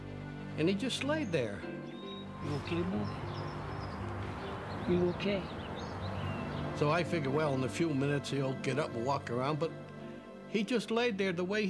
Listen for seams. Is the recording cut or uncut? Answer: uncut